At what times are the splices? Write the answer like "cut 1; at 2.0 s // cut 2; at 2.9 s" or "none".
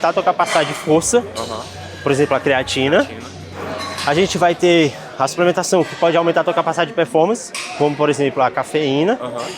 none